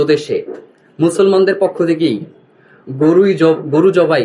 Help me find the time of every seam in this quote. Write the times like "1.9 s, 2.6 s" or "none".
none